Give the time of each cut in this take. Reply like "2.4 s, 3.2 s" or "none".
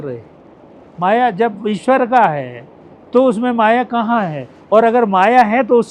none